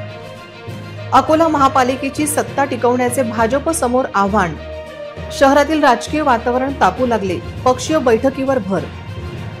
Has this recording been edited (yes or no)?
no